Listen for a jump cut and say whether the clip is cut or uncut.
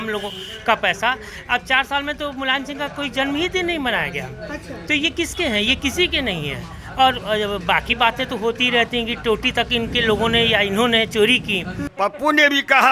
cut